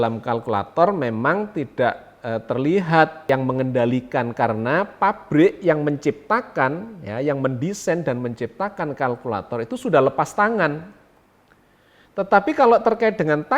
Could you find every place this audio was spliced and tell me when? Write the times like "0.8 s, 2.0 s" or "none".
3.3 s